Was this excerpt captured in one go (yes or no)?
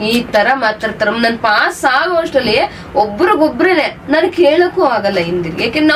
yes